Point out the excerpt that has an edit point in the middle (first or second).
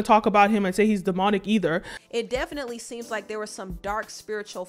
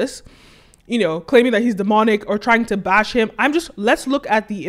first